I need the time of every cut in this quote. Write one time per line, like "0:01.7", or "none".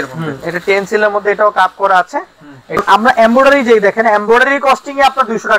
0:02.8